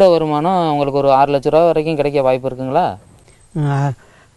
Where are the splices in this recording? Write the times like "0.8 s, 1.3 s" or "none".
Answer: none